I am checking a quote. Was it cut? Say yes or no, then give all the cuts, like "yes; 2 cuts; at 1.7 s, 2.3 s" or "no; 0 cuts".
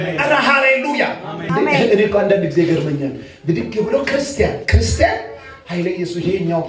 yes; 1 cut; at 1.3 s